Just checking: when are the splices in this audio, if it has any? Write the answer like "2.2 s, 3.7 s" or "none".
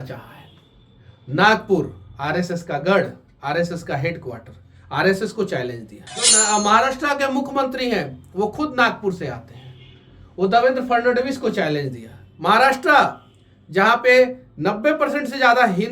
6.3 s